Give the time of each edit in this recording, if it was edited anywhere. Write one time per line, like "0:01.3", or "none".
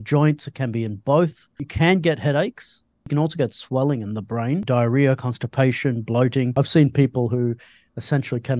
0:01.7
0:03.0
0:04.6
0:06.5